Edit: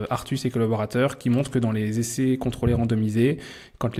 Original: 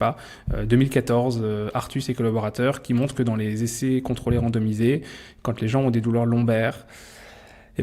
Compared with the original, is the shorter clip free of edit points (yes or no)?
yes